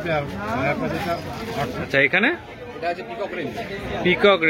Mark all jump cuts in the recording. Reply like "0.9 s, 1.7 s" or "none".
1.9 s